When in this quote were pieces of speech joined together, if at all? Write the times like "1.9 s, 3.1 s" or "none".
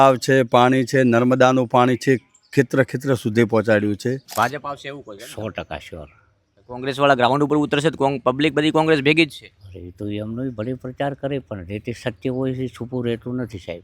4.2 s